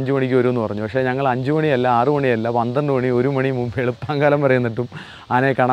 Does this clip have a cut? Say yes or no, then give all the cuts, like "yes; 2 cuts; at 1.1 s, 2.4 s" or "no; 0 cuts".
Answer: no; 0 cuts